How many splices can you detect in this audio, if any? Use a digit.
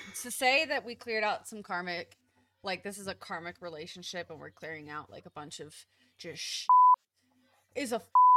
0